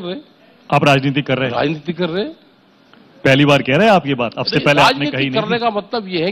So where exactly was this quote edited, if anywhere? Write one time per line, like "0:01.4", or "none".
none